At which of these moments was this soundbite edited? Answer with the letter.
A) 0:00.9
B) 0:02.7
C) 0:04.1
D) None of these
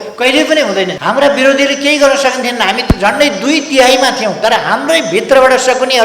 A